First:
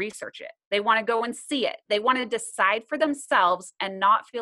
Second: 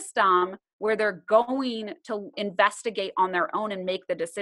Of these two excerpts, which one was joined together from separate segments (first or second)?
second